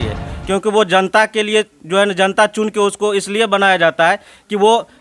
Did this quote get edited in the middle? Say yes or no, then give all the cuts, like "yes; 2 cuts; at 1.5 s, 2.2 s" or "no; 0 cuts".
no; 0 cuts